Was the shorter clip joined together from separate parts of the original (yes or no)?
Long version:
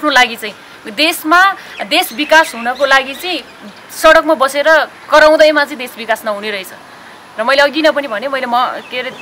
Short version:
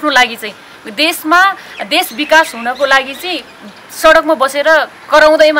no